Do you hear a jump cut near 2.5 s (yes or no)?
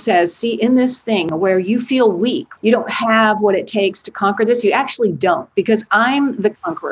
yes